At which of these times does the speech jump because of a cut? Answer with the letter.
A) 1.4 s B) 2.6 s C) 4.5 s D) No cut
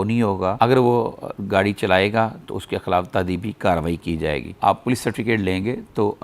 C